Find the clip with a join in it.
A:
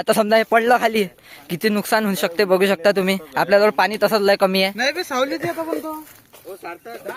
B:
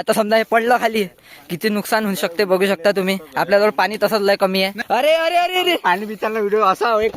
B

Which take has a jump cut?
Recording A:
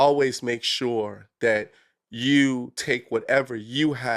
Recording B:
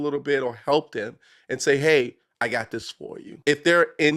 B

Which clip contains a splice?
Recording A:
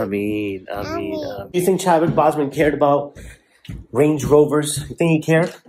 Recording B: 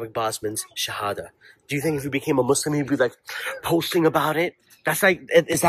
A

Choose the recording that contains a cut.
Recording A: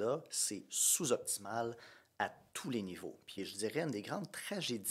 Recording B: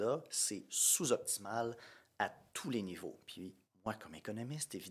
A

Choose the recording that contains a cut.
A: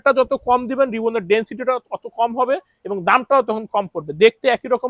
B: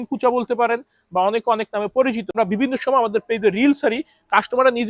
B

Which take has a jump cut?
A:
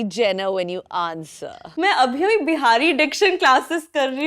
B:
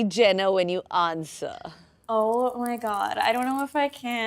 A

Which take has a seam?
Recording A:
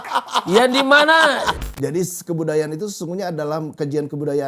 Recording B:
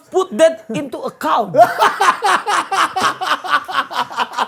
A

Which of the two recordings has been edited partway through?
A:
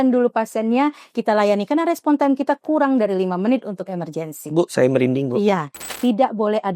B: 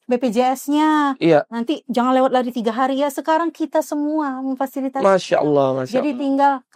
A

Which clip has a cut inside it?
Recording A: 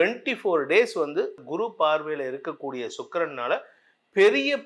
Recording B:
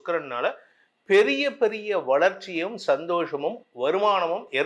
A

